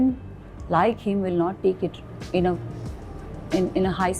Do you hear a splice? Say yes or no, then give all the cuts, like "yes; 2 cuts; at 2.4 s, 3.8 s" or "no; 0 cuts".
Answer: no; 0 cuts